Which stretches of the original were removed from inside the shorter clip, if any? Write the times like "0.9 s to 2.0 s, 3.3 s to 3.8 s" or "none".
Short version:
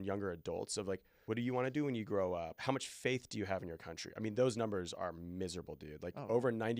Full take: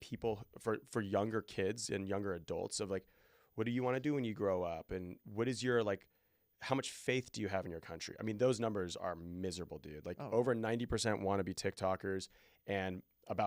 3.1 s to 3.4 s, 4.8 s to 6.5 s